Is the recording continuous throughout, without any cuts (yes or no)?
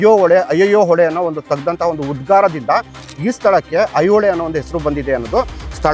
yes